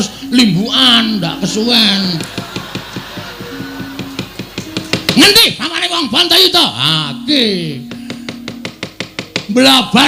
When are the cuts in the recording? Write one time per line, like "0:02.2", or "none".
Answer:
none

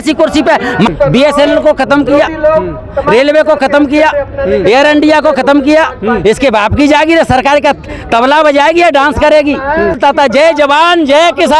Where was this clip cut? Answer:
0:00.9
0:10.0

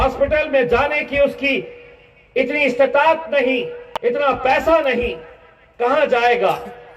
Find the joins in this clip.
none

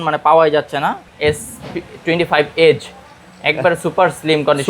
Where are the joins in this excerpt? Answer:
0:01.1

